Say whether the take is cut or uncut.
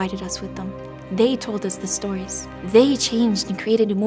uncut